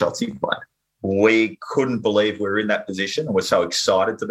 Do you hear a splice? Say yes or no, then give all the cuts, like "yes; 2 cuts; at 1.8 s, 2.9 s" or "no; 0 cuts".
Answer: yes; 1 cut; at 0.9 s